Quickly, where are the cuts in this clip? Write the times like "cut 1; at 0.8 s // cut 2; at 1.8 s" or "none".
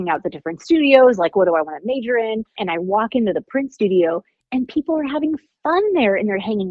cut 1; at 2.6 s